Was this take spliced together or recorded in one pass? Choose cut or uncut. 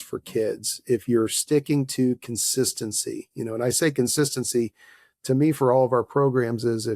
uncut